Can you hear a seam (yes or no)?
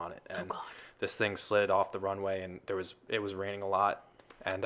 no